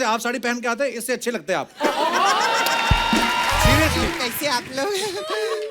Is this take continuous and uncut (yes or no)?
no